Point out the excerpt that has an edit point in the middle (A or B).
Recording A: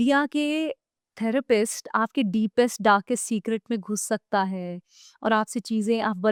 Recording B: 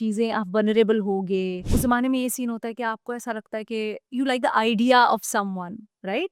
B